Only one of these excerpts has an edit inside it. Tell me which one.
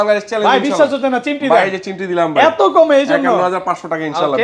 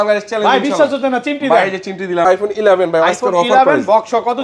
second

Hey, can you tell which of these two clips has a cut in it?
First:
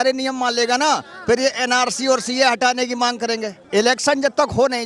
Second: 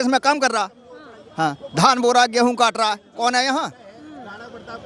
first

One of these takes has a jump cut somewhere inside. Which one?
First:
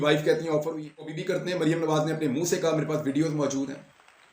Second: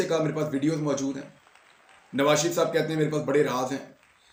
first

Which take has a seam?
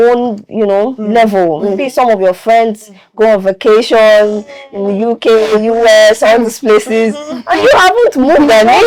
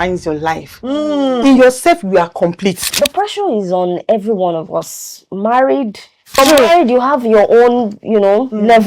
second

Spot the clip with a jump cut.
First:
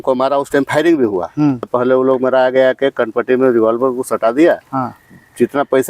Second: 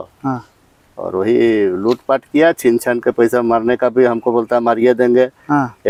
first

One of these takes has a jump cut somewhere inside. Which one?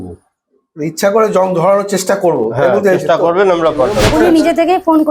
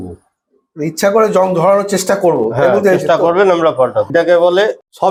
first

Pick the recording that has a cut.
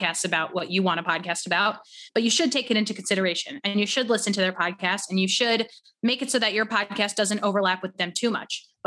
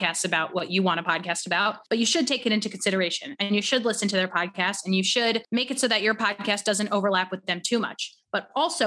second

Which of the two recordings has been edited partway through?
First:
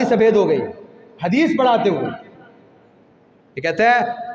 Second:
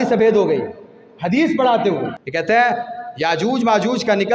second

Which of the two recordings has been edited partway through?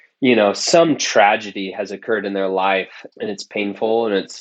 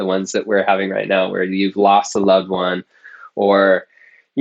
first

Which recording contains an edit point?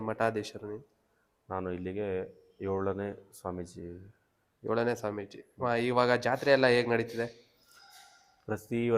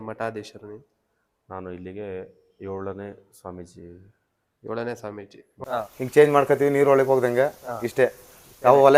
second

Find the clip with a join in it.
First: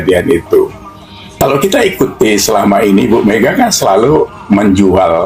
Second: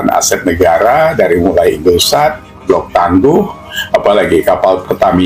first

